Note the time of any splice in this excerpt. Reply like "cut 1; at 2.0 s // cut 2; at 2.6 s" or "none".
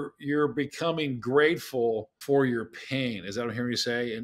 cut 1; at 2.1 s

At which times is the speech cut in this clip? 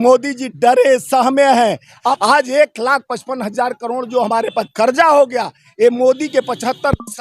cut 1; at 2.2 s

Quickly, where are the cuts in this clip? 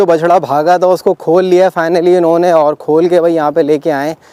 none

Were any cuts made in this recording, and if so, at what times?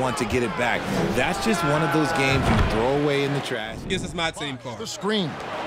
cut 1; at 3.7 s

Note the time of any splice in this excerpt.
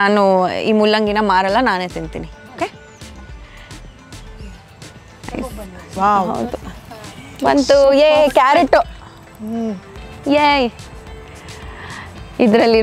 none

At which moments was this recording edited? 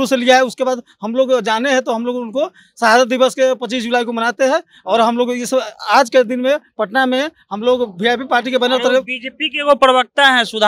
none

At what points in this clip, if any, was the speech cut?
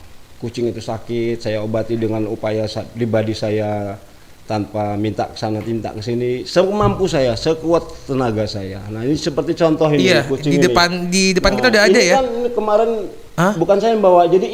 none

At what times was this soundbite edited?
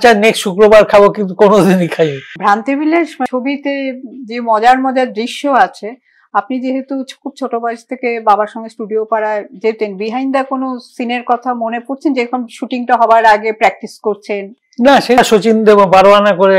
cut 1; at 3.3 s // cut 2; at 15.2 s

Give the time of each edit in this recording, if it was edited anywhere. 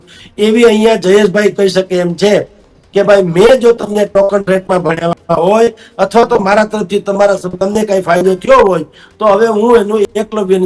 none

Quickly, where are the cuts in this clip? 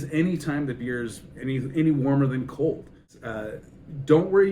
cut 1; at 3.1 s

